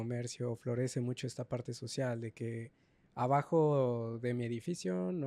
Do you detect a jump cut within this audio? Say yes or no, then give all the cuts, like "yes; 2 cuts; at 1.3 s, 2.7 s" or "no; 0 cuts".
no; 0 cuts